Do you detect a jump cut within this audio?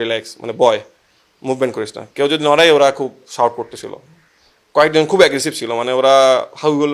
no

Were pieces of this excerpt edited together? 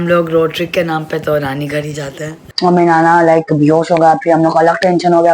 yes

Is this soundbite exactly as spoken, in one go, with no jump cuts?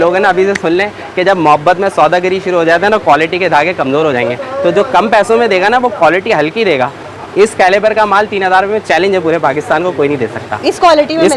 yes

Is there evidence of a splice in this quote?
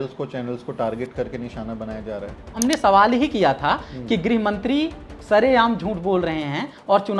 yes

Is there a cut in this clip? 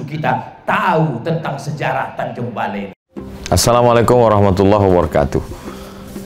yes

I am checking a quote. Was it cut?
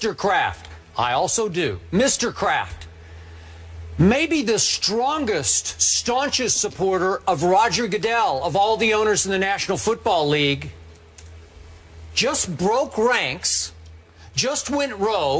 no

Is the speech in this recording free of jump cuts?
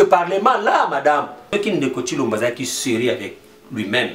no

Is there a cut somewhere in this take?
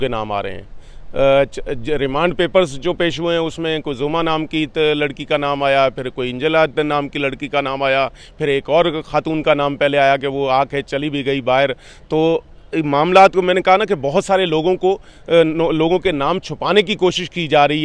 no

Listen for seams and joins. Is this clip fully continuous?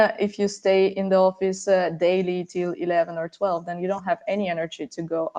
yes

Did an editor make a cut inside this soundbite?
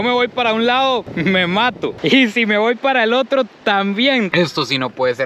yes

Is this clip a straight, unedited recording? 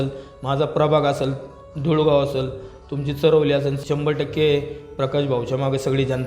no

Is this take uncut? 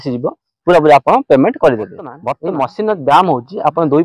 no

